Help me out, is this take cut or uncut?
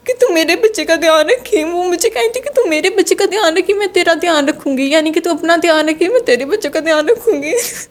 uncut